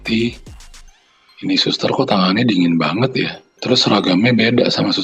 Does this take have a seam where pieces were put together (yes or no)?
yes